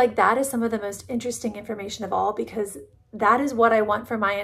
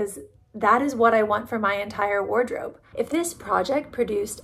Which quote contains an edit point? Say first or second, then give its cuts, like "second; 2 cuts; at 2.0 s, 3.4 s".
second; 1 cut; at 2.8 s